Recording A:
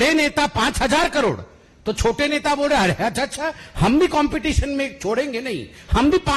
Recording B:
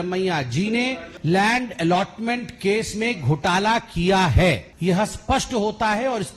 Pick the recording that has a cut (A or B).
B